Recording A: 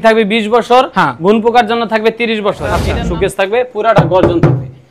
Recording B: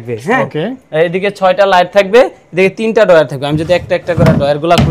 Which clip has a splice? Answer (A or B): A